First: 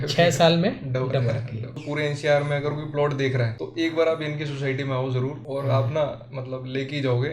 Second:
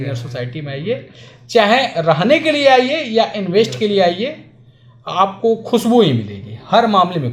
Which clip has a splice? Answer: first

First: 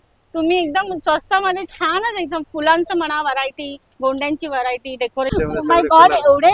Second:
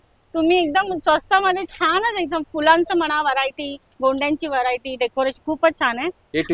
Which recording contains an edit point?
first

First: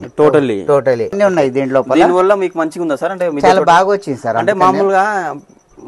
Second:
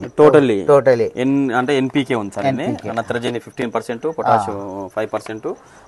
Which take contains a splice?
first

